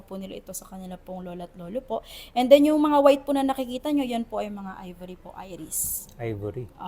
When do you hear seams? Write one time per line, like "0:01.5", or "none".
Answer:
none